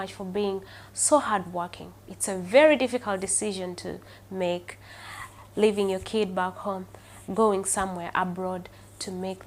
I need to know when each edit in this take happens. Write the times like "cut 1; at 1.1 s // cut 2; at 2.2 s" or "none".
none